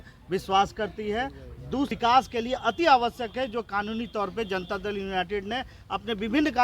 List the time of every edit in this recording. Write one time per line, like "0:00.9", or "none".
0:01.9